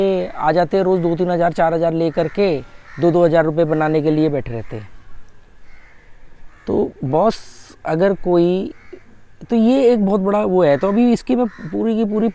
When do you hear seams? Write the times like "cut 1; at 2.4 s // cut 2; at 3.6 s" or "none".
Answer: none